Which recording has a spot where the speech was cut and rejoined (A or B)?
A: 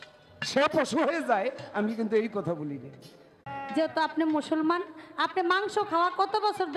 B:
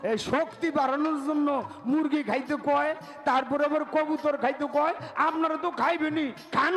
A